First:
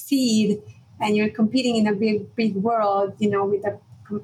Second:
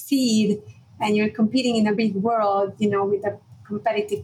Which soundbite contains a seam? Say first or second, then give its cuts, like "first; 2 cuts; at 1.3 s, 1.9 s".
second; 1 cut; at 2.0 s